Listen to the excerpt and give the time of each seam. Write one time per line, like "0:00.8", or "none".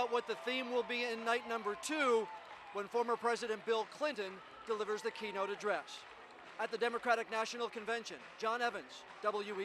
none